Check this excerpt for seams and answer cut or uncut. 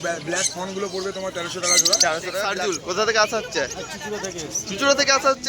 cut